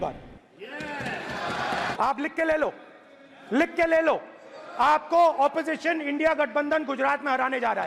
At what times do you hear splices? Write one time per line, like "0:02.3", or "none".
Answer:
0:01.9